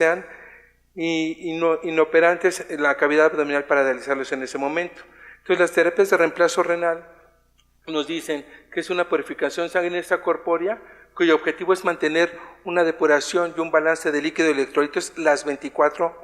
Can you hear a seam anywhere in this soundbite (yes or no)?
yes